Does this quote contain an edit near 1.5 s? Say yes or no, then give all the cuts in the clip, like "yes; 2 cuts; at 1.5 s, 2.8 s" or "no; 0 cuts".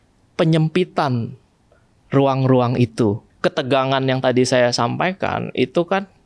no; 1 cut; at 3.3 s